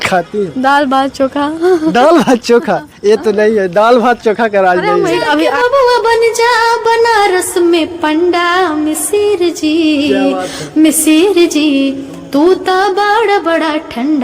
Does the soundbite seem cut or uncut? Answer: cut